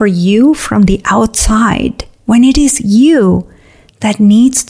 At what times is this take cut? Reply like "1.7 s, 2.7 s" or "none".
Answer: 2.1 s